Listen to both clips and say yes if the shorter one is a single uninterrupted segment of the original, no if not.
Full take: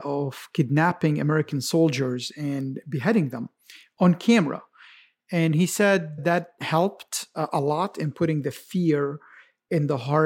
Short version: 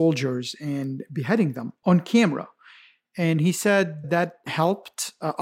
no